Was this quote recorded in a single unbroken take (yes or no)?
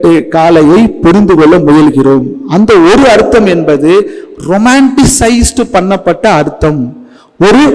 yes